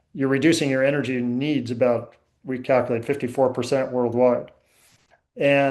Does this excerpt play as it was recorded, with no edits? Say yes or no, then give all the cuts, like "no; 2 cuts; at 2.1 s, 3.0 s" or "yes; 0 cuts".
yes; 0 cuts